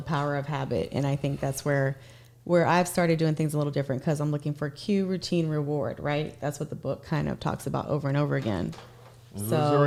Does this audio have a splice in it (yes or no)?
no